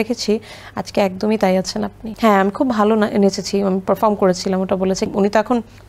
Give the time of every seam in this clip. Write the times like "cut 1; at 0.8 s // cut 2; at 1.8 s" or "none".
cut 1; at 2.1 s // cut 2; at 5.2 s